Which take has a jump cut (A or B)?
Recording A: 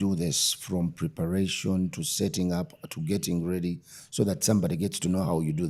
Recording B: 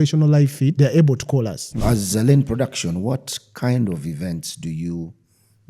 B